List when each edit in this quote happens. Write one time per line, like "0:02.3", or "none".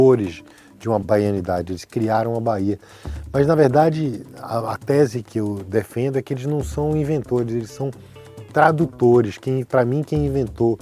0:01.0